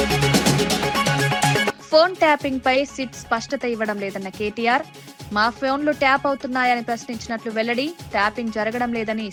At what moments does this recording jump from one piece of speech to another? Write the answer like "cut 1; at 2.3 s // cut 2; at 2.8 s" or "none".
none